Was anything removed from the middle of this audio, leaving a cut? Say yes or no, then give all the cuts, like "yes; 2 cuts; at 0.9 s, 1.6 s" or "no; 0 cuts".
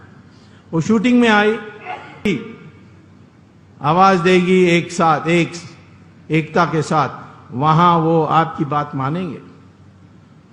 yes; 1 cut; at 2.3 s